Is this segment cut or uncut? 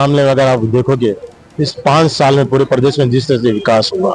uncut